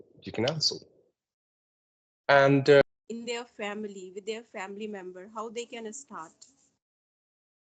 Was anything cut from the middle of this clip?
yes; 1 cut; at 2.8 s

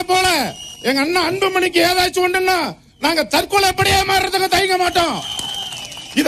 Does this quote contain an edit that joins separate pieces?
no; 0 cuts

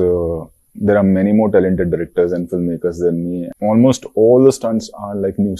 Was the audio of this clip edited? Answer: yes; 1 cut; at 3.5 s

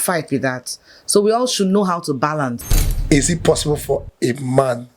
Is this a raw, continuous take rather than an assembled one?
no; 1 cut; at 2.6 s

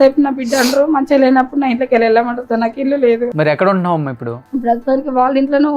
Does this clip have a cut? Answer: yes; 2 cuts; at 3.3 s, 4.3 s

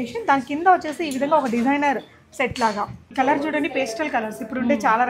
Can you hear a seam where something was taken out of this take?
yes; 1 cut; at 3.0 s

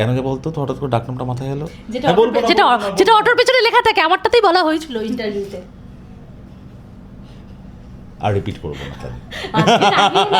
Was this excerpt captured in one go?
yes; 0 cuts

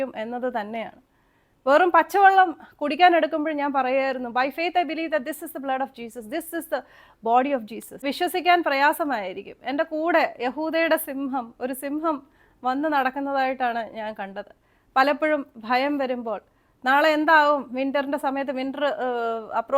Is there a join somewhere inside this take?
yes; 1 cut; at 7.8 s

